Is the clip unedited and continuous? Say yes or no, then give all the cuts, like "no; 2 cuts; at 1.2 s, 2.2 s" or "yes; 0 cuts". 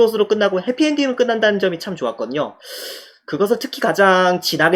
yes; 0 cuts